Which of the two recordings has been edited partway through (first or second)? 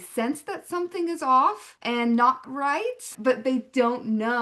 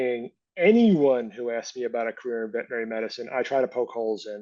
first